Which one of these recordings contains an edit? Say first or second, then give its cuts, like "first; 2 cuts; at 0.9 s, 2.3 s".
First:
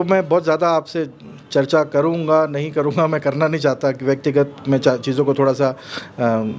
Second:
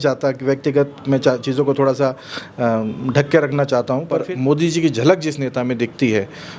second; 1 cut; at 4.2 s